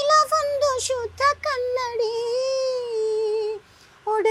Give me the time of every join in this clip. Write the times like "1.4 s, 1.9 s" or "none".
none